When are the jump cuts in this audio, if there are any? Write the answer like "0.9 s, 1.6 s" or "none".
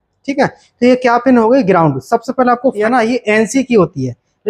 2.8 s